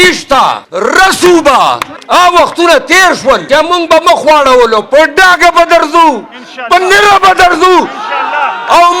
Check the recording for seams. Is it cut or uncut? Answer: uncut